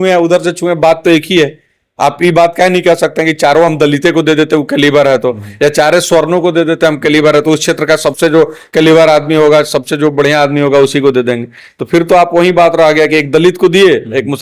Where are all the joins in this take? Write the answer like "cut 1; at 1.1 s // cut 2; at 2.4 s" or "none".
none